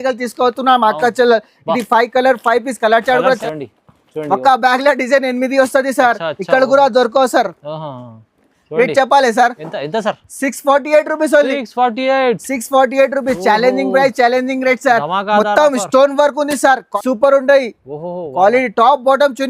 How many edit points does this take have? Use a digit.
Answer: 2